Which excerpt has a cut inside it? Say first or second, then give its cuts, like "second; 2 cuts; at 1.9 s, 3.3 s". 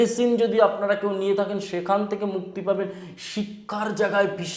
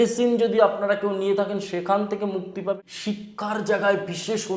second; 1 cut; at 2.9 s